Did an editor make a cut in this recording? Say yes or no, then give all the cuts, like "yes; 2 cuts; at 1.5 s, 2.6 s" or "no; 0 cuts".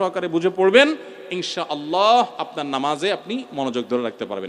no; 0 cuts